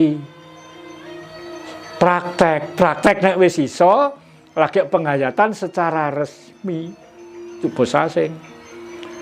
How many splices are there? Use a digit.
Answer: 1